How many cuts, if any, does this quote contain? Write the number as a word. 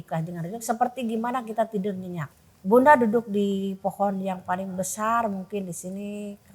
one